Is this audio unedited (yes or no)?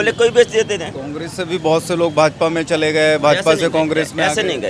yes